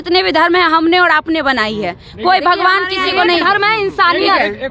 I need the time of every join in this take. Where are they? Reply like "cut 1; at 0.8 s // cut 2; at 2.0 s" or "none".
none